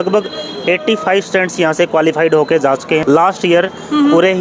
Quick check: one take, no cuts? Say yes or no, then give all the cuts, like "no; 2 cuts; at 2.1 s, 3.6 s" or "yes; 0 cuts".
no; 1 cut; at 3.0 s